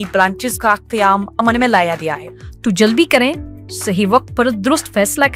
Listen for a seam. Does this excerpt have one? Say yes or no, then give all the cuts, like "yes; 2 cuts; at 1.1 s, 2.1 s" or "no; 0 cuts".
yes; 1 cut; at 2.2 s